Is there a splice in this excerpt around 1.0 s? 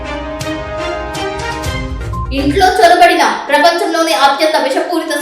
no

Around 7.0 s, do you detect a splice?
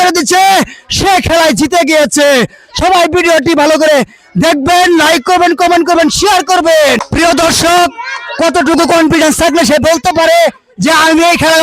yes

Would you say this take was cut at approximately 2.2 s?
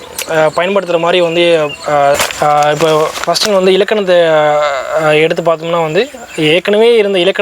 yes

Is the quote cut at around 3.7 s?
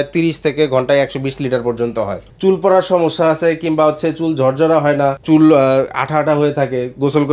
no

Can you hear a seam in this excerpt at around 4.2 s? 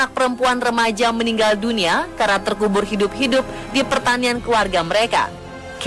yes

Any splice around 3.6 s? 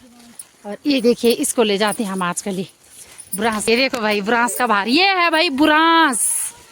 yes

